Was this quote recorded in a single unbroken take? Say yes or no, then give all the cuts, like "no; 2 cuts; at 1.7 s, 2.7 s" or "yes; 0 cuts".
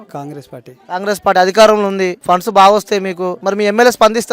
no; 1 cut; at 3.4 s